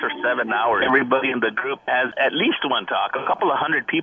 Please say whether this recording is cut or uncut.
cut